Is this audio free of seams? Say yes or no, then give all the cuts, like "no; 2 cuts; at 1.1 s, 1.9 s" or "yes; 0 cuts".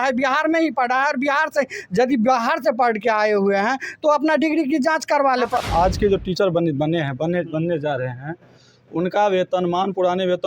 no; 1 cut; at 5.6 s